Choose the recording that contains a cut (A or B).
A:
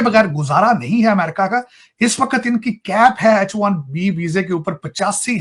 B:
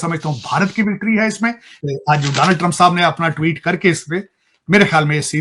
B